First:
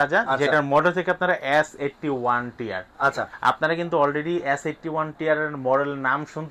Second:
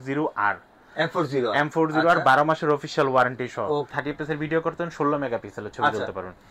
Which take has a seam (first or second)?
second